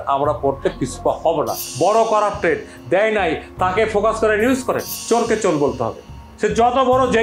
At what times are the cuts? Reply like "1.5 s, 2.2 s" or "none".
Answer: 1.6 s, 4.9 s